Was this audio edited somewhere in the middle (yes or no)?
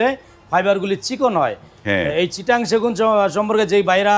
no